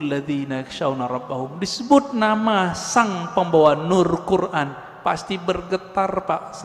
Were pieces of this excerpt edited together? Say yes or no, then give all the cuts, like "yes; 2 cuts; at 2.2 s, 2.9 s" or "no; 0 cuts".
no; 0 cuts